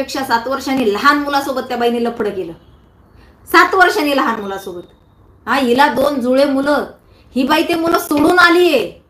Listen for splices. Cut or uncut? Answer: uncut